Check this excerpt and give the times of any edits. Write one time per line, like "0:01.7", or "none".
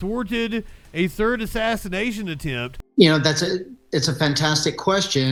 none